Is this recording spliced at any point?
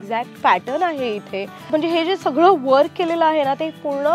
yes; 1 cut; at 1.6 s

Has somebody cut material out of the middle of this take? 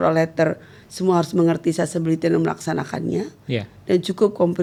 no; 0 cuts

